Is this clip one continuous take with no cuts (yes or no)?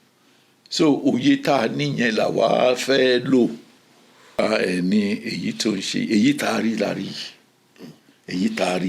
no